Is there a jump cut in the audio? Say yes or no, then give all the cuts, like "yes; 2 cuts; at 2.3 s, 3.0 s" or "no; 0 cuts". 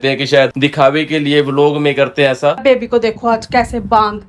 yes; 1 cut; at 2.6 s